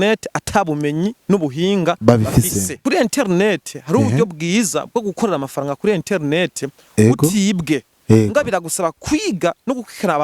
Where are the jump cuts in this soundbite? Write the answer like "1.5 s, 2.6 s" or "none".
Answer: 2.8 s